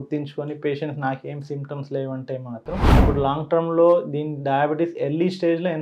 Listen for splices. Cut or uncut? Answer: cut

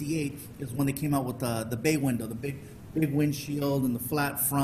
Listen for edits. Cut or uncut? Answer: uncut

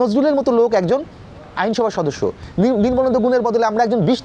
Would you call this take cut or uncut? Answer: cut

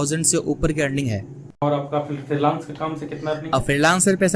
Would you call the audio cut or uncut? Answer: cut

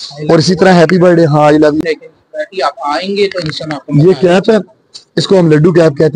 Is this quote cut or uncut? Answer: cut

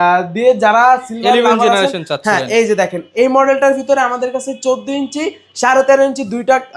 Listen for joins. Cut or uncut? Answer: uncut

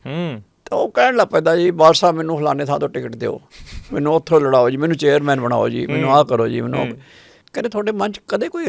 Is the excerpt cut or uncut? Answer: cut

